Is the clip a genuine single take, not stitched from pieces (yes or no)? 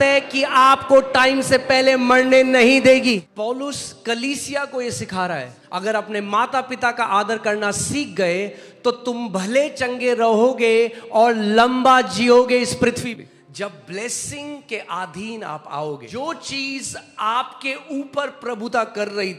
no